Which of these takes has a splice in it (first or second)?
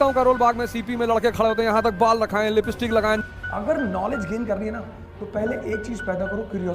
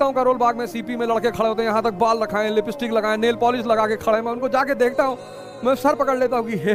first